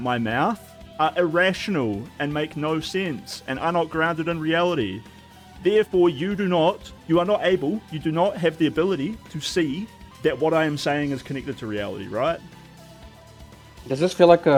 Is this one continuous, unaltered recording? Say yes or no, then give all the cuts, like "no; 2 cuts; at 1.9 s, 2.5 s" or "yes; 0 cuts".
yes; 0 cuts